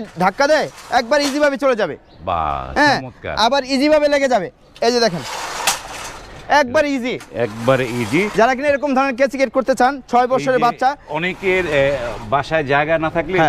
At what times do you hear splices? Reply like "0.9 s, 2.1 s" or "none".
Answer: none